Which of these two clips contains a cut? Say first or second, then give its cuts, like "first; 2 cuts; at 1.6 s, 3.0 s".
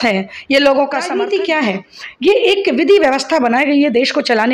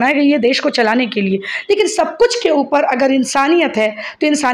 first; 1 cut; at 1.1 s